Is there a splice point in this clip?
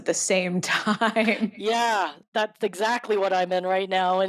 yes; 1 cut; at 2.2 s

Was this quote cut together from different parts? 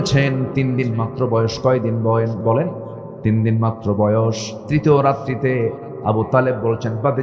yes; 1 cut; at 4.5 s

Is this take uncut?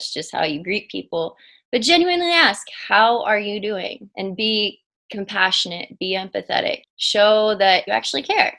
no; 3 cuts; at 4.0 s, 6.9 s, 7.8 s

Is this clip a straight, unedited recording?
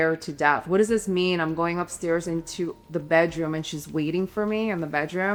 yes; 0 cuts

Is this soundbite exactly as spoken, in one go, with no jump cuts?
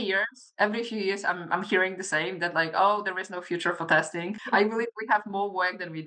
no; 1 cut; at 4.3 s

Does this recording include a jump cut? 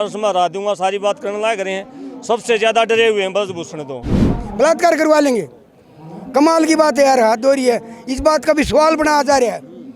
yes; 1 cut; at 4.3 s

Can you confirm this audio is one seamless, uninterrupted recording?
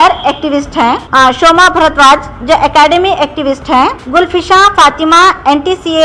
no; 2 cuts; at 1.0 s, 4.0 s

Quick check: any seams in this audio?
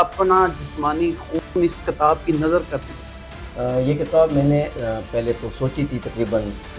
no; 0 cuts

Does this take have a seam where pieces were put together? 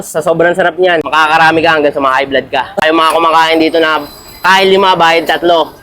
yes; 2 cuts; at 1.1 s, 2.8 s

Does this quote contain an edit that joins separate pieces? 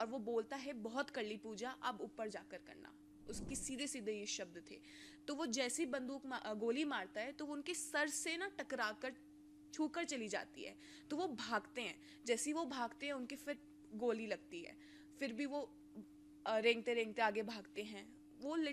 no; 0 cuts

